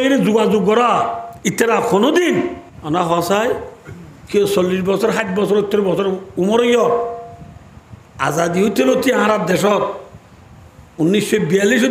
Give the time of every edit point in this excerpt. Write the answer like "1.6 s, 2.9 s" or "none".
1.3 s, 2.7 s